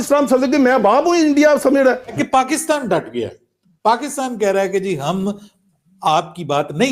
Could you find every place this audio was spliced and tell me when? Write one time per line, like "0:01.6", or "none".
0:02.1